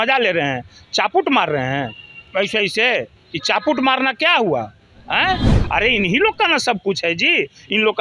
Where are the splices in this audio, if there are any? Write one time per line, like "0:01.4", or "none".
0:05.5